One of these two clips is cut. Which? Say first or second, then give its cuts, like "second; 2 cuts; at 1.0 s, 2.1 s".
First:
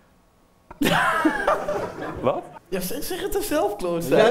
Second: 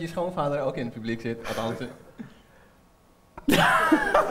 first; 1 cut; at 2.6 s